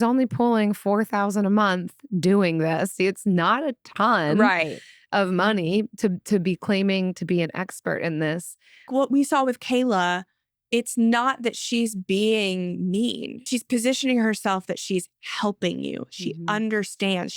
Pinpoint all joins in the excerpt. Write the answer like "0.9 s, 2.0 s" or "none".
2.9 s, 8.9 s, 13.5 s